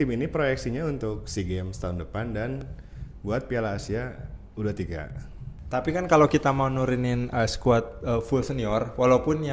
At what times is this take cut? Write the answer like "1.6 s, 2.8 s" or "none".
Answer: 5.5 s